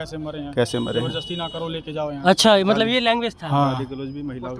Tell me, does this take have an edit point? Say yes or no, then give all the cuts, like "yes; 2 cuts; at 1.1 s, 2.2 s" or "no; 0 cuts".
no; 0 cuts